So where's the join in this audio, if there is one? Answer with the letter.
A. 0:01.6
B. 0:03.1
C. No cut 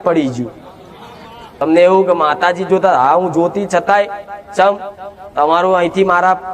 A